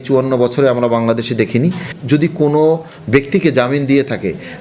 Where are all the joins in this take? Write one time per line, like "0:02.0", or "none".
0:01.9